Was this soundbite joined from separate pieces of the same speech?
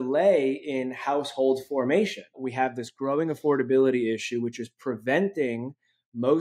yes; 1 cut; at 2.4 s

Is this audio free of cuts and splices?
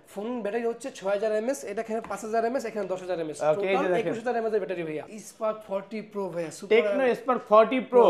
no; 1 cut; at 5.0 s

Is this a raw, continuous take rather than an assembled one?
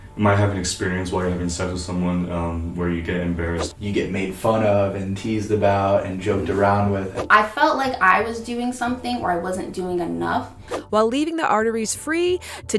no; 3 cuts; at 3.7 s, 7.1 s, 10.7 s

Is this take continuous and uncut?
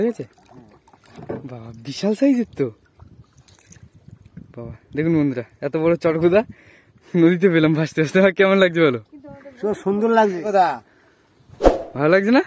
no; 1 cut; at 10.4 s

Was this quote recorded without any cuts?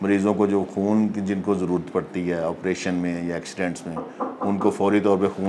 yes; 0 cuts

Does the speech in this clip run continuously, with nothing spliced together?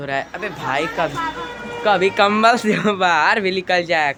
yes; 0 cuts

